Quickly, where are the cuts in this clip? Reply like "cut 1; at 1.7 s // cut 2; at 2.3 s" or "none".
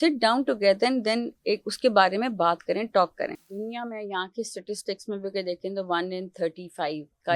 cut 1; at 3.4 s